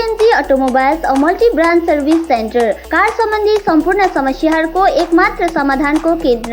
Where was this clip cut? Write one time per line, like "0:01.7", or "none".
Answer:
none